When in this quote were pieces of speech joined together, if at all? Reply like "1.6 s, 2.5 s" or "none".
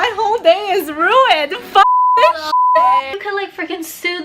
3.1 s